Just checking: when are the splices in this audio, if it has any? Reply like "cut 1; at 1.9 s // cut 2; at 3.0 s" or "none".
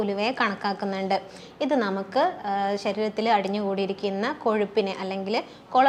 none

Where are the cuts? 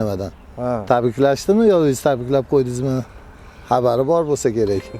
none

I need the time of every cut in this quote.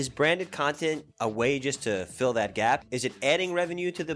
cut 1; at 1.1 s // cut 2; at 2.8 s

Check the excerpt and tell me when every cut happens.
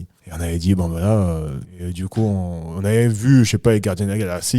cut 1; at 1.6 s

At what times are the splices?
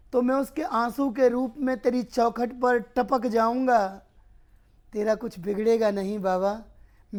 none

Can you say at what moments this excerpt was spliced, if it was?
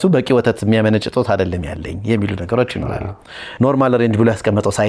cut 1; at 3.4 s

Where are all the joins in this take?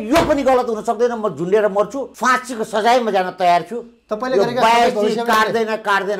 cut 1; at 2.1 s

